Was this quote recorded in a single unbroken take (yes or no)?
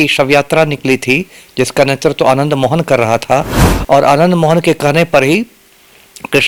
yes